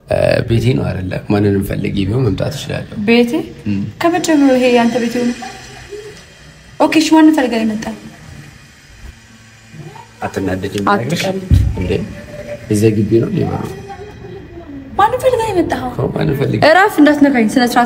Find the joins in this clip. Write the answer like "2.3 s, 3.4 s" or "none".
none